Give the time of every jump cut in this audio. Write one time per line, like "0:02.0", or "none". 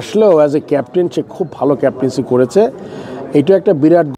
none